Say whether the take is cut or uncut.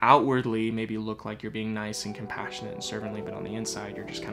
uncut